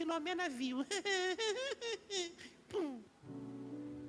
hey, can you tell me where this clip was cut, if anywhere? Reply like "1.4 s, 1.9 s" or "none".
3.1 s

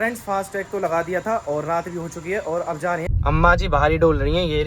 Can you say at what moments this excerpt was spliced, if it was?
3.1 s

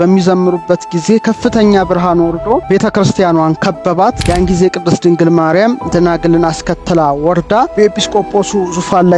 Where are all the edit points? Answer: 2.6 s, 4.2 s, 7.7 s

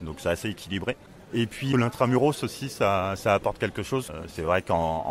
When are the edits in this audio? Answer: 1.6 s, 4.1 s

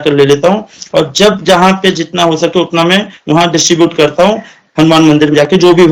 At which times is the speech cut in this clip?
none

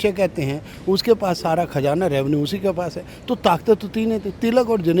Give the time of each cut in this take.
none

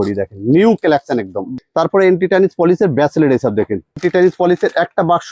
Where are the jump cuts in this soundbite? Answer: 1.5 s, 4.0 s

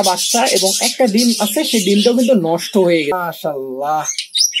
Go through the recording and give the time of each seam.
3.1 s

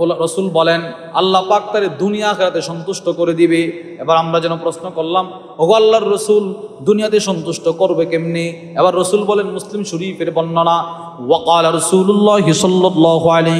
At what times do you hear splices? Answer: none

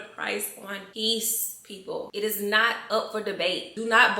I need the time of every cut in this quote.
2.1 s

